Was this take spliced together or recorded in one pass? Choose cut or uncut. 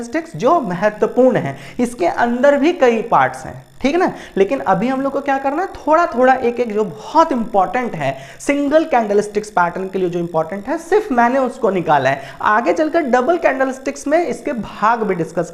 uncut